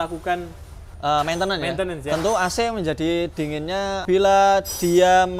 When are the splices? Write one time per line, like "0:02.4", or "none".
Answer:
0:00.9
0:04.0